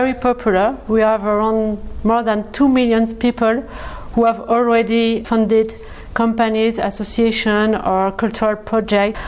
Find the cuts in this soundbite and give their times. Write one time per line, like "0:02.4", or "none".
none